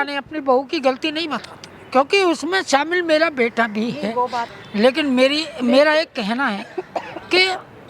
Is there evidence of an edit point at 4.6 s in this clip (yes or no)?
yes